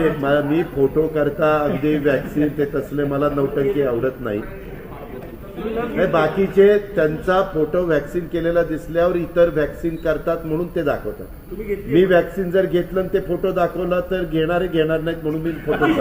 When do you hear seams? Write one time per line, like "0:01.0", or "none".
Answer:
none